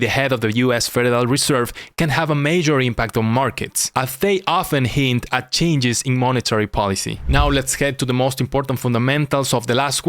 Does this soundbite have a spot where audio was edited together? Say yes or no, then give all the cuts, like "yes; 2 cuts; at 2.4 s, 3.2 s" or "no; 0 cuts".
no; 0 cuts